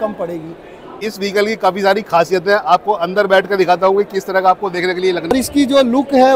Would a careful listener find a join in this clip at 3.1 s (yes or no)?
no